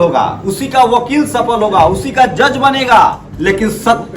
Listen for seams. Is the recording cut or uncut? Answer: cut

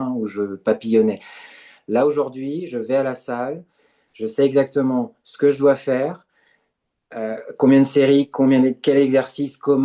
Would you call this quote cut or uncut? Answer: uncut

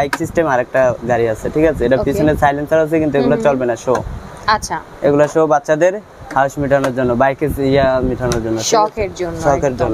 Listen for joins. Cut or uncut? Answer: uncut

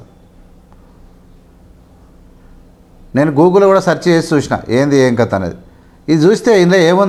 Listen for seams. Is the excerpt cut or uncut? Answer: uncut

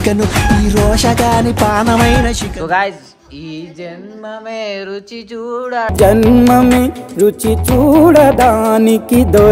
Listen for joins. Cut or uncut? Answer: cut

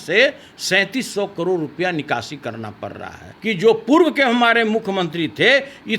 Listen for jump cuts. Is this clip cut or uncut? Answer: cut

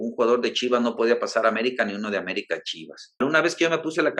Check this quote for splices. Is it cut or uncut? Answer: cut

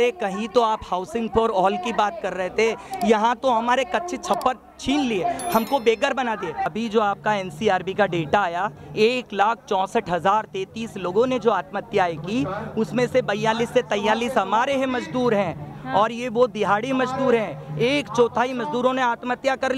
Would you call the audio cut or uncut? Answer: cut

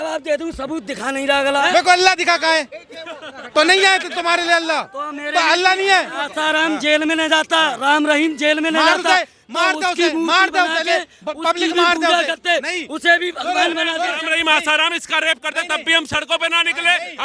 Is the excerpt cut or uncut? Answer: cut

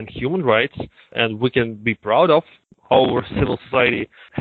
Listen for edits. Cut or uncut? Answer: cut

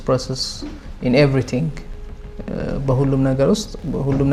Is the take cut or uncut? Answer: uncut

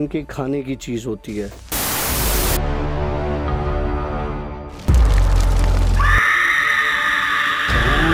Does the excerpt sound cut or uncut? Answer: uncut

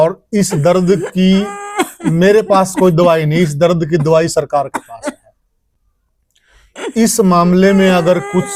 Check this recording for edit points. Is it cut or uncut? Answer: uncut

